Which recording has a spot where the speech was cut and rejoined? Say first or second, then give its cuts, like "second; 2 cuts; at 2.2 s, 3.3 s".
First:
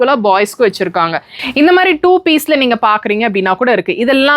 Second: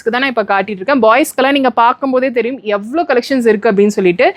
first; 1 cut; at 1.5 s